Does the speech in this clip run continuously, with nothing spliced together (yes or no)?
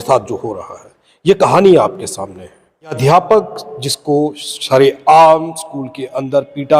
no